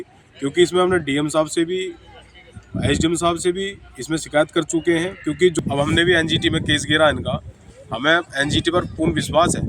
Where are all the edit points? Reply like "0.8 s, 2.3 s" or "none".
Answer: 5.5 s